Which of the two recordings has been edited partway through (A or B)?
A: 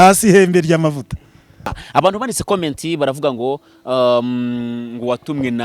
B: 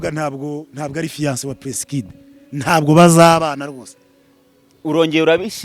A